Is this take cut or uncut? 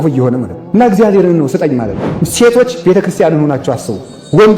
cut